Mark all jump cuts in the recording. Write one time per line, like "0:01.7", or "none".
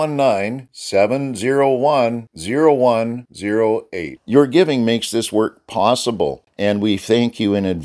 0:06.4